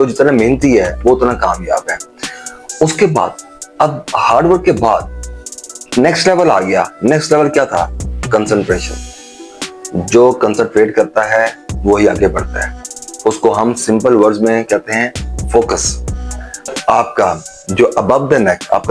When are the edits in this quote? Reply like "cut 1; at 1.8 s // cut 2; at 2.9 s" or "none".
cut 1; at 16.7 s